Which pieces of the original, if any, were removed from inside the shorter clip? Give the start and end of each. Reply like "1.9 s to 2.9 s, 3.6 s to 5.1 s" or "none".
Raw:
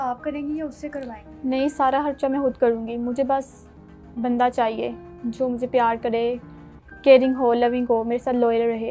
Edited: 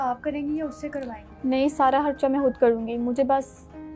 none